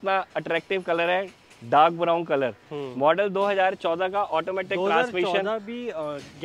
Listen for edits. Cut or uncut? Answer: uncut